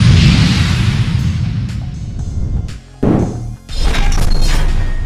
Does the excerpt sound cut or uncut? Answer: uncut